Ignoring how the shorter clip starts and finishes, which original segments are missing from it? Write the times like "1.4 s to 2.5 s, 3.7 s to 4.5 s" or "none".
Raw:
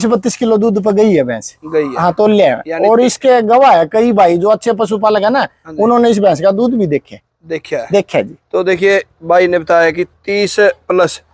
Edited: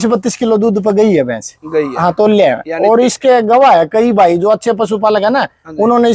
none